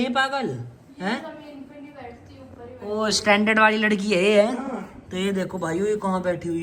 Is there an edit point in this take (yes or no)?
no